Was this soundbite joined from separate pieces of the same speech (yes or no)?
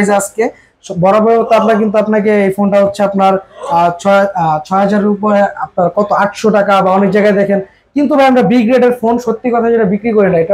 no